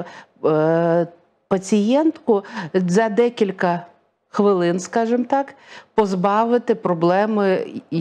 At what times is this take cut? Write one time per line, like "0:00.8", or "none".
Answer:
none